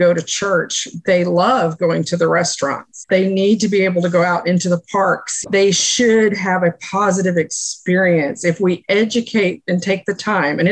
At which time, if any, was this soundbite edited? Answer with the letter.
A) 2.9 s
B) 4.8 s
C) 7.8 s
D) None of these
A